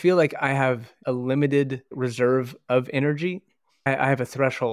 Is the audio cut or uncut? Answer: cut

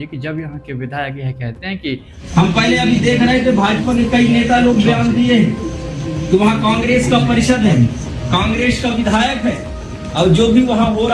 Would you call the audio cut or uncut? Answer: cut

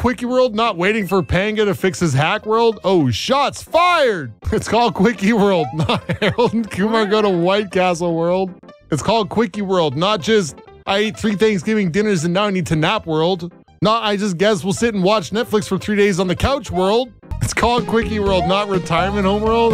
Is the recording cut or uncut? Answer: cut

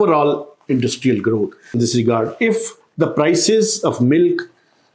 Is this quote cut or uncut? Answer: cut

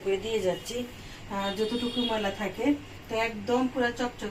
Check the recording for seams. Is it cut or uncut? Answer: uncut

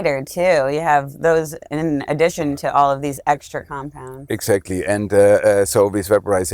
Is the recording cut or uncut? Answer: uncut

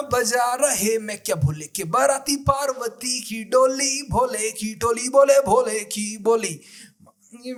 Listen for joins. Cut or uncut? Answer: uncut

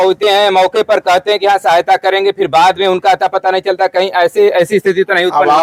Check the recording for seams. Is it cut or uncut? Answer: uncut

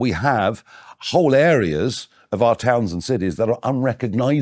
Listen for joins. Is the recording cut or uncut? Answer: uncut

